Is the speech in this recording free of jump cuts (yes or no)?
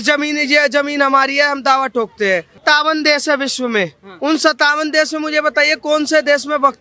no